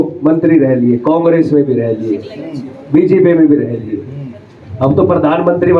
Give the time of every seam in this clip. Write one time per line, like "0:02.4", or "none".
none